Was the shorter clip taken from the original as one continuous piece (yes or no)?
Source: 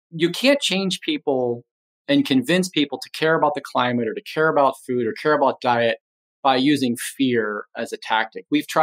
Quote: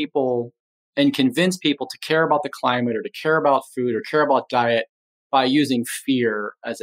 yes